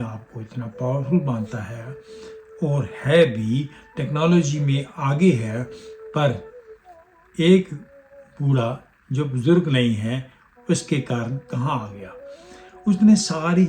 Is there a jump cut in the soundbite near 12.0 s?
no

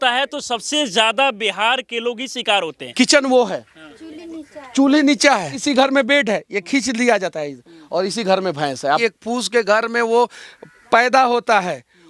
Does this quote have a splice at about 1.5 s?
no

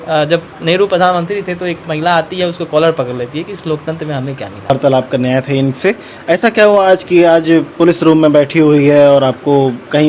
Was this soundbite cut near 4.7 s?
yes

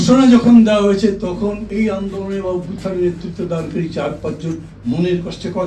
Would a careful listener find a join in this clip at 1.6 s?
yes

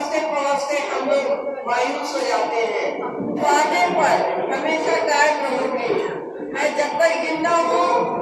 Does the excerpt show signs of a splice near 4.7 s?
no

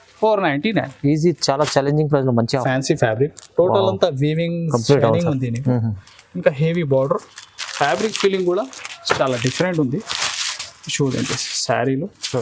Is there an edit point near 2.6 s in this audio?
yes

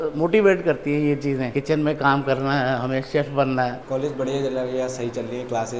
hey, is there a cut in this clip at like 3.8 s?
yes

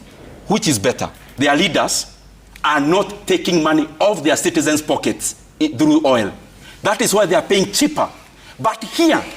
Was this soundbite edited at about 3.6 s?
no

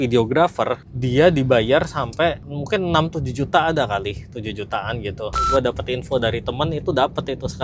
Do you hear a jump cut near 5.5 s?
yes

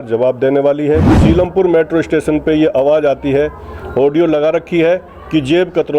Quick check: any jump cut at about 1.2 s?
yes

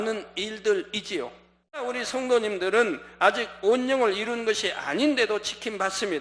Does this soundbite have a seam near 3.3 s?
no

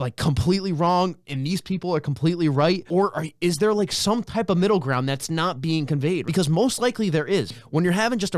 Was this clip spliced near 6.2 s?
yes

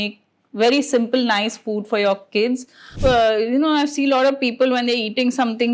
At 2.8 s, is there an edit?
yes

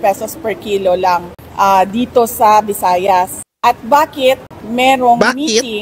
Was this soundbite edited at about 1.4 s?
yes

